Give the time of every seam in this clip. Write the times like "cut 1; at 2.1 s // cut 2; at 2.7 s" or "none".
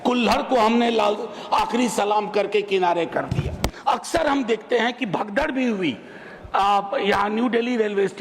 cut 1; at 3.6 s